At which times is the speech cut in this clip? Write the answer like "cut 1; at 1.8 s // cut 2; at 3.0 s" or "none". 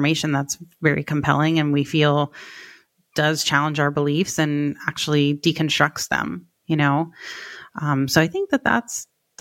none